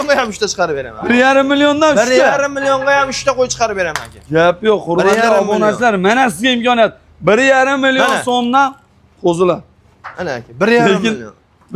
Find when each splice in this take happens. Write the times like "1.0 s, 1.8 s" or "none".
none